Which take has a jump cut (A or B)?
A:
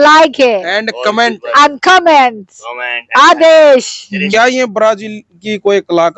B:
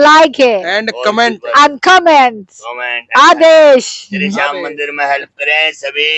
A